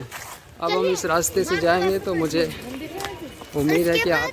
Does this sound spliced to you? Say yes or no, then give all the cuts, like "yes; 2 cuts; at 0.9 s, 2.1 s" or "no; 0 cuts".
no; 0 cuts